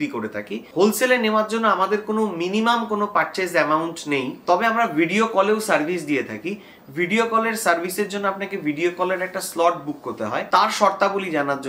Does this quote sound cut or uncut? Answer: uncut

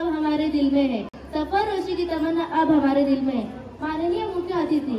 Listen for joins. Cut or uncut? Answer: uncut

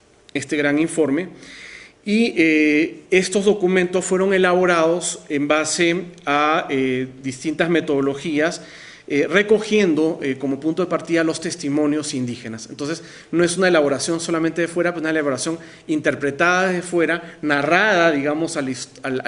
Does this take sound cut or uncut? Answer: uncut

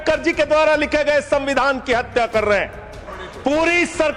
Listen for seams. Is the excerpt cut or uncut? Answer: cut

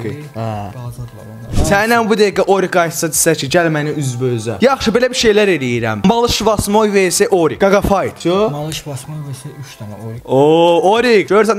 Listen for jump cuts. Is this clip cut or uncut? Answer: uncut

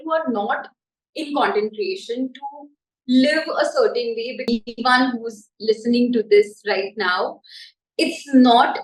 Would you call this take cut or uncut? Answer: cut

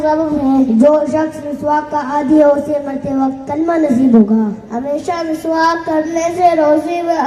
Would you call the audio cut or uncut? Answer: uncut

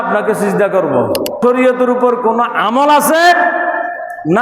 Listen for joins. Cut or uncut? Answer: cut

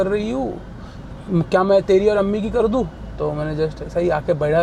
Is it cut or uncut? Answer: uncut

